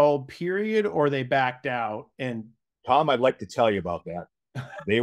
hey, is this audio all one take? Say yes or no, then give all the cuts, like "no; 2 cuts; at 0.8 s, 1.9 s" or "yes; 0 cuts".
yes; 0 cuts